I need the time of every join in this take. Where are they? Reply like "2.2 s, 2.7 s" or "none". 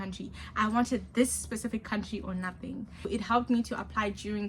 3.1 s